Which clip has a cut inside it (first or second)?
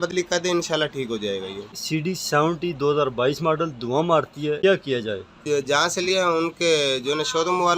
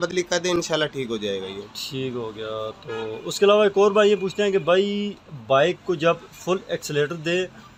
first